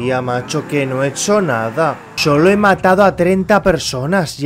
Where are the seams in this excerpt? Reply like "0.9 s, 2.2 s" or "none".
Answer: 2.1 s